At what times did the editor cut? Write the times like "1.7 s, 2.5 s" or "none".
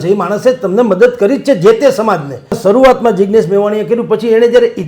2.6 s